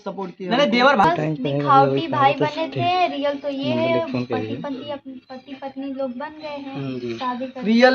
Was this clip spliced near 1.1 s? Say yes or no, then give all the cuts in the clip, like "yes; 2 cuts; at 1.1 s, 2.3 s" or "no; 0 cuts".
yes; 1 cut; at 1.1 s